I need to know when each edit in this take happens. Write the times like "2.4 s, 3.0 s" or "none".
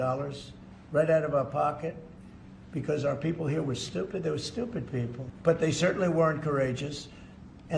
5.2 s